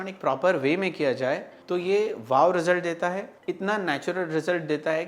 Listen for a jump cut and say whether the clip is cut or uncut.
cut